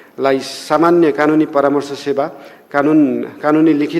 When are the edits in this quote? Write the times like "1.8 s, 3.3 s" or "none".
none